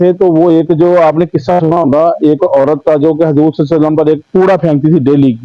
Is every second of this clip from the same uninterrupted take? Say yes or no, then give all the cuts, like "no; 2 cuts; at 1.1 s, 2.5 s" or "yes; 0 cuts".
yes; 0 cuts